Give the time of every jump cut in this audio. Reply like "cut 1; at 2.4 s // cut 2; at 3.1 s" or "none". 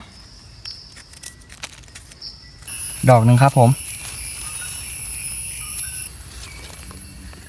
cut 1; at 2.7 s // cut 2; at 6.1 s